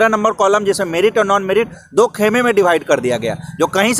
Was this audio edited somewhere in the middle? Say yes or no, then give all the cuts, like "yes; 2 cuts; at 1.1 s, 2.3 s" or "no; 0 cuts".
no; 0 cuts